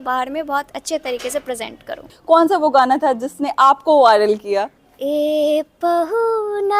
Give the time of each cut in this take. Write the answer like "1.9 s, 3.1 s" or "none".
2.1 s, 4.8 s